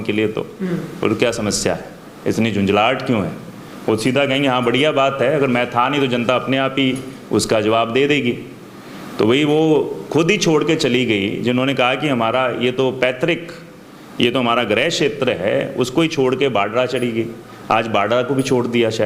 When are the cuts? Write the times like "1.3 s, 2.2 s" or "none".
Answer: none